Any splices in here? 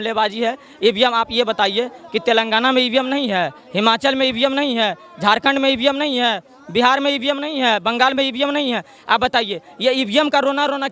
no; 0 cuts

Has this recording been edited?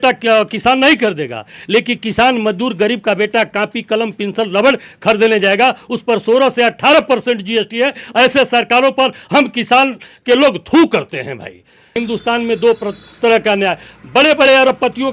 yes; 1 cut; at 12.0 s

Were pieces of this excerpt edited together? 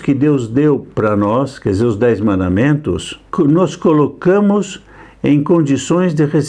yes; 1 cut; at 3.3 s

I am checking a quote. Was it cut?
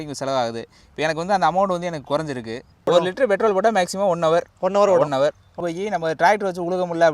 yes; 2 cuts; at 2.8 s, 5.5 s

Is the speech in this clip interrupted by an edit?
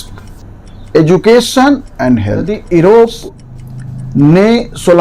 yes; 1 cut; at 2.6 s

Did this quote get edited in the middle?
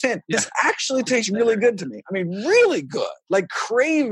no; 0 cuts

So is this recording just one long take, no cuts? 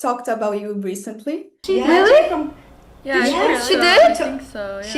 no; 1 cut; at 1.5 s

